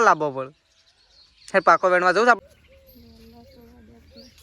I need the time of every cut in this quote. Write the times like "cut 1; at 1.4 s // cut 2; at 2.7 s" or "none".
cut 1; at 2.4 s